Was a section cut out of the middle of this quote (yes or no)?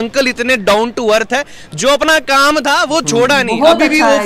no